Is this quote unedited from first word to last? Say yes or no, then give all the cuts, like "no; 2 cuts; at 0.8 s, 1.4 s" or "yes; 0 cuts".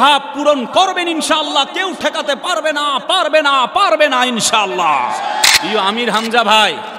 no; 1 cut; at 5.4 s